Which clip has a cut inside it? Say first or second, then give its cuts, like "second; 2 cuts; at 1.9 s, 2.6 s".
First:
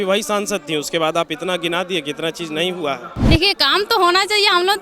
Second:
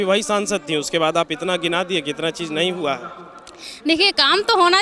first; 1 cut; at 3.1 s